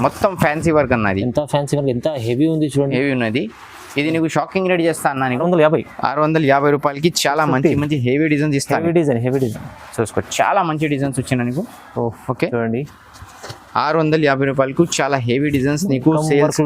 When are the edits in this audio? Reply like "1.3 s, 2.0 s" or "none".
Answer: 5.4 s